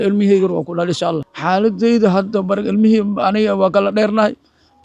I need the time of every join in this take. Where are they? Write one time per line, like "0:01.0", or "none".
0:01.3